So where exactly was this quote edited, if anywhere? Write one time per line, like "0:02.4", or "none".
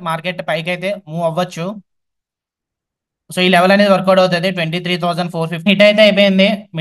0:05.7